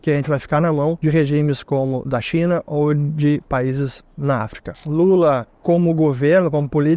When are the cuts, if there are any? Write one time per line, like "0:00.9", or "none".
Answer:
0:01.0
0:04.8